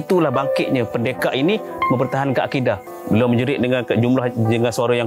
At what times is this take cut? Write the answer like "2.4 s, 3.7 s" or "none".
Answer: 2.9 s